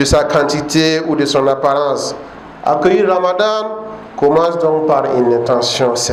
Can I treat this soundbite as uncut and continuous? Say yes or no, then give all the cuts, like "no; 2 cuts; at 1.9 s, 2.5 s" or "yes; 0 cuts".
yes; 0 cuts